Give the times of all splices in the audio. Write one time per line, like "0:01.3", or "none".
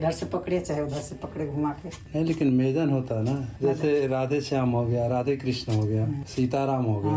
0:06.2